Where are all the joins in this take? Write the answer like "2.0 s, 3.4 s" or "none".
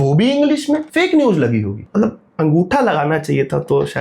0.9 s, 1.8 s